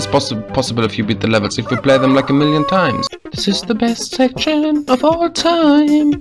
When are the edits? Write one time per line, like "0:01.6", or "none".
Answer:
0:03.0